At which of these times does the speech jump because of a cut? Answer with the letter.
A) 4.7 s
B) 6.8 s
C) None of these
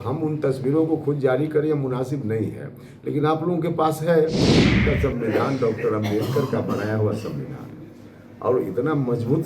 A